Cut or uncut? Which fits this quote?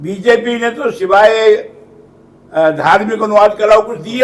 uncut